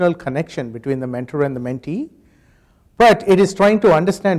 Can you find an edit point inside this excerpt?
no; 0 cuts

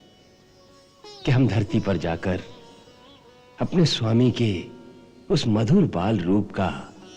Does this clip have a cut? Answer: no; 0 cuts

